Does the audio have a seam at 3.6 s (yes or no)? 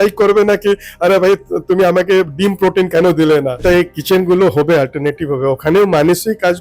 yes